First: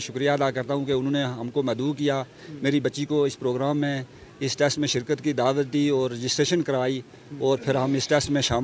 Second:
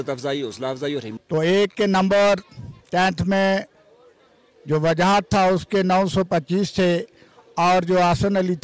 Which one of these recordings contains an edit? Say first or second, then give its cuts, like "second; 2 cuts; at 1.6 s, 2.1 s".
second; 1 cut; at 1.1 s